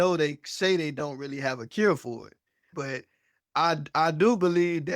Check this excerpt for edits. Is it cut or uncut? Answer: cut